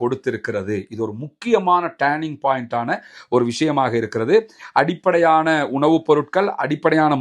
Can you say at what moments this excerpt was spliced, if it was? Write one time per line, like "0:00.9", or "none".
none